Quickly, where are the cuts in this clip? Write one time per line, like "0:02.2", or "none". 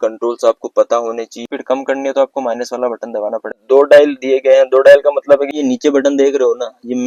0:01.5
0:03.6
0:05.5